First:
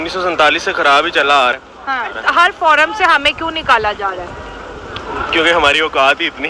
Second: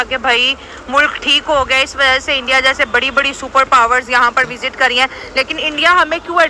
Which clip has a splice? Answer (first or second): first